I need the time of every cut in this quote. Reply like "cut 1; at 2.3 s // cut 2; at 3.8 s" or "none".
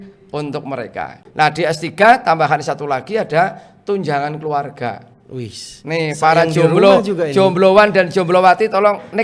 cut 1; at 1.2 s